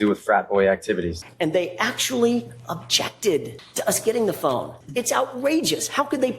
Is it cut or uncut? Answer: cut